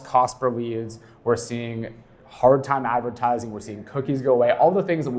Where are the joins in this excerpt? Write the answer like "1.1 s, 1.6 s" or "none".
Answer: none